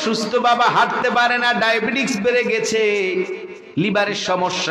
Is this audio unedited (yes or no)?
yes